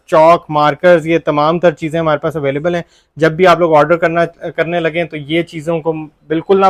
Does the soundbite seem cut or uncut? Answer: uncut